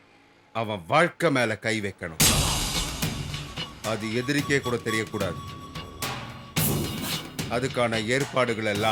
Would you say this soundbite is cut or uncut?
uncut